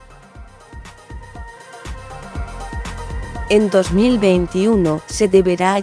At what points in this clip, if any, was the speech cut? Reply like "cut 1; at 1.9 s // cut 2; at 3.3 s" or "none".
cut 1; at 3.4 s // cut 2; at 4.7 s